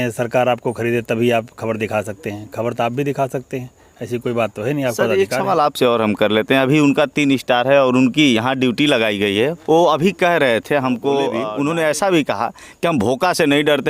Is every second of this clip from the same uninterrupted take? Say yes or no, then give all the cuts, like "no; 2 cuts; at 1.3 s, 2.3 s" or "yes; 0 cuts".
no; 1 cut; at 11.5 s